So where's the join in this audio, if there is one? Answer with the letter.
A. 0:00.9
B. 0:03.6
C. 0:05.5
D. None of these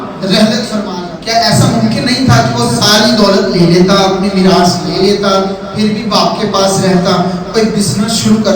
A